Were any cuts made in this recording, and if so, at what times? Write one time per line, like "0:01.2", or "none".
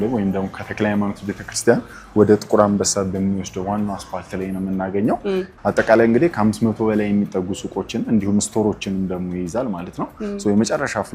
0:05.5